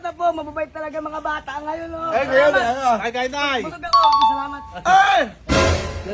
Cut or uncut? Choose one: uncut